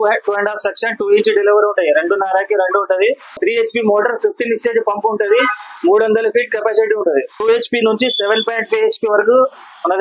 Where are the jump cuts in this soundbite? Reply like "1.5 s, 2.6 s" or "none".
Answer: 3.4 s, 7.3 s